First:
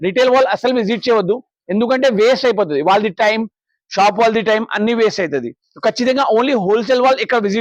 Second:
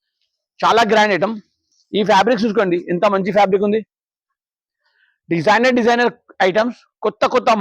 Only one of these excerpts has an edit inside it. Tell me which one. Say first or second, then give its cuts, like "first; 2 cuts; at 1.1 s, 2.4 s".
second; 1 cut; at 1.6 s